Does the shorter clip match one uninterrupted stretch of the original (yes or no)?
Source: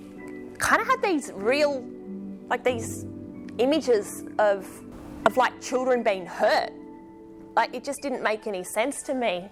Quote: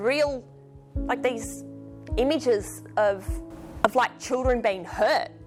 yes